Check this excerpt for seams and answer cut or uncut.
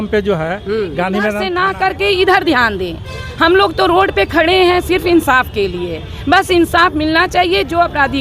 cut